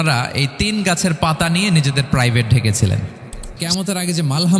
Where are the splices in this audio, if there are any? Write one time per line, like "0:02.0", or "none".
0:03.6